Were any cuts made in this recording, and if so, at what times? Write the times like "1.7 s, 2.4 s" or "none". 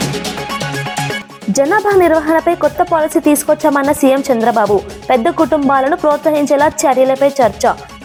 none